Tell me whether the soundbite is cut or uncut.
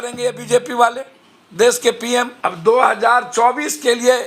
cut